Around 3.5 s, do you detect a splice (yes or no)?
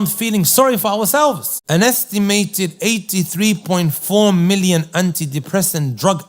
no